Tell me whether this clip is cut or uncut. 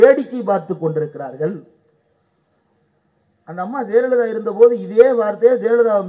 uncut